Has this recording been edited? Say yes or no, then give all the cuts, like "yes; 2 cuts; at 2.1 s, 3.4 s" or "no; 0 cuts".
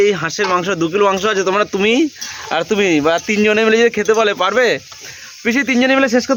no; 0 cuts